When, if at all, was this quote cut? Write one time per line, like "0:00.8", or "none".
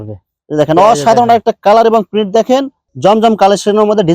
0:02.8